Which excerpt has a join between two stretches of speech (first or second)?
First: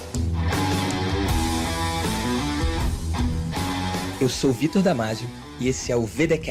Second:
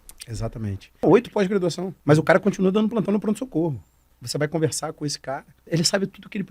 second